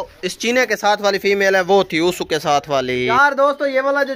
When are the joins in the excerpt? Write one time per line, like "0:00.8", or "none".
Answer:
0:03.1